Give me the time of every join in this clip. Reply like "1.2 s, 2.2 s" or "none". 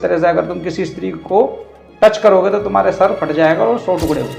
none

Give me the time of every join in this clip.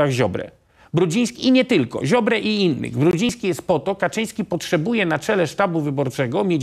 none

